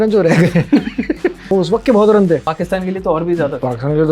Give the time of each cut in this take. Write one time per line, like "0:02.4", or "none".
0:01.5
0:02.4